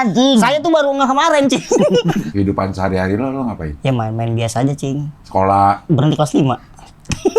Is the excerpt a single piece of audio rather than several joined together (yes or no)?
no